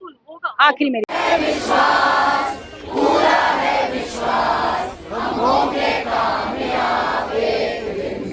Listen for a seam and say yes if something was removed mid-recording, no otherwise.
no